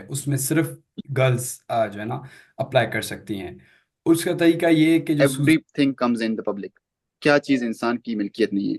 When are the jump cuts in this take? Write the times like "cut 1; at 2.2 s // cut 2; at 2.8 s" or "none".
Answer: cut 1; at 5.2 s